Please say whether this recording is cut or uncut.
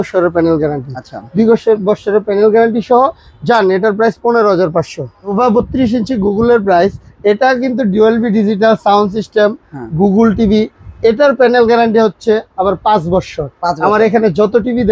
cut